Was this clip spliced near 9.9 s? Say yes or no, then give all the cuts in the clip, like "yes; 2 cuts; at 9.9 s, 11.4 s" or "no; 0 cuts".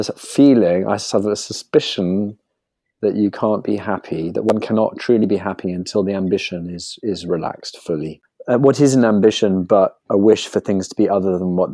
no; 1 cut; at 8.3 s